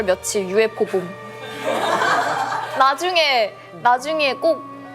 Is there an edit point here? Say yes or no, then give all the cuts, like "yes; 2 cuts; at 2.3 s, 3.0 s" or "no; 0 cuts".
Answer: no; 0 cuts